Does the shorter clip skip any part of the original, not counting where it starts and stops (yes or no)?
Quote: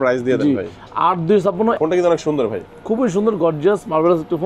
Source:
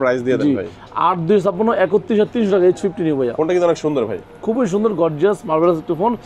yes